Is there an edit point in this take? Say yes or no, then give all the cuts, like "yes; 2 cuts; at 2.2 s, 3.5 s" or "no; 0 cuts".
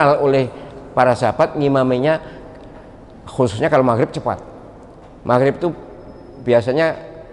no; 0 cuts